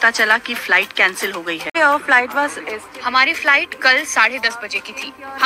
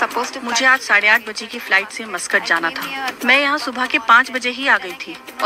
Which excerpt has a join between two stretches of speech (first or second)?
first